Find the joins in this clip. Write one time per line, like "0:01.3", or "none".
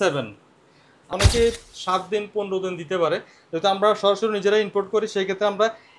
0:01.1